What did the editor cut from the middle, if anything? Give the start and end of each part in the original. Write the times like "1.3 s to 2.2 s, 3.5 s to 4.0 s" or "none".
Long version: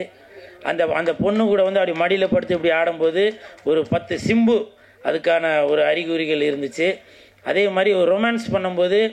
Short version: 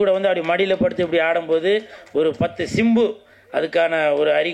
none